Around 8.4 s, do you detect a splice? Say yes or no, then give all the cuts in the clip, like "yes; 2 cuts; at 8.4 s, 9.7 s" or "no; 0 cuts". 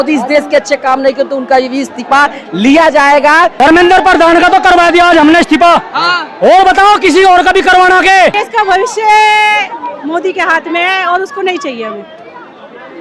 yes; 2 cuts; at 3.5 s, 8.4 s